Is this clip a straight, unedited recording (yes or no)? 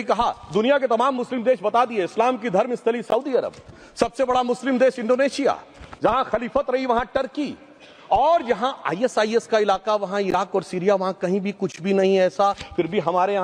yes